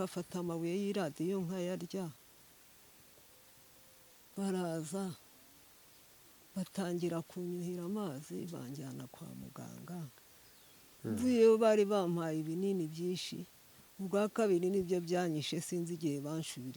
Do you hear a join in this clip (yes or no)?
no